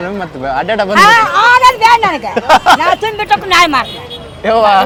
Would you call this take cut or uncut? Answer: uncut